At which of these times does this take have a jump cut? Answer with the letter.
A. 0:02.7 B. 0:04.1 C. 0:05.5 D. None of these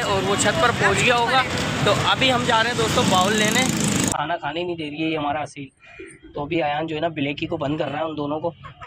B